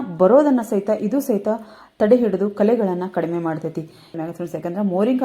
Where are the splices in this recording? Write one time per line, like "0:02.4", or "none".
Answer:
0:04.2